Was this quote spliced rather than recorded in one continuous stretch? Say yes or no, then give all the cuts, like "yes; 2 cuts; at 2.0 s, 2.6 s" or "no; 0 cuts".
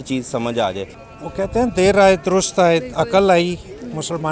yes; 1 cut; at 1.0 s